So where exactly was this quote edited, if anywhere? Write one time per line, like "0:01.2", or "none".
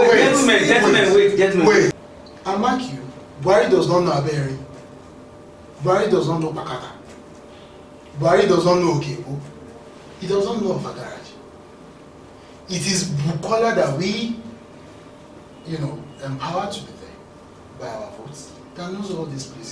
0:02.0